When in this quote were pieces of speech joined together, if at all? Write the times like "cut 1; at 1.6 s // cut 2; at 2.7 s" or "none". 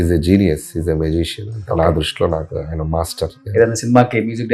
cut 1; at 3.4 s